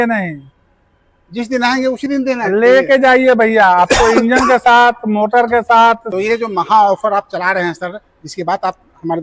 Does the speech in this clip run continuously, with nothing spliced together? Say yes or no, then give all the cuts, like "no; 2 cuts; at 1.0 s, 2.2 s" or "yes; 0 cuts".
no; 1 cut; at 6.1 s